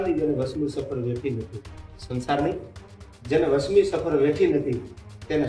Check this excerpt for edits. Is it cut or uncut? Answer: uncut